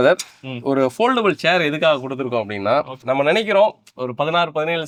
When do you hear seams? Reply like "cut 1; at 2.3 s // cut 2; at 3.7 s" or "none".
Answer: none